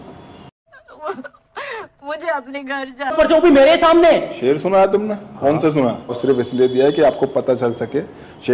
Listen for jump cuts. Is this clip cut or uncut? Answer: cut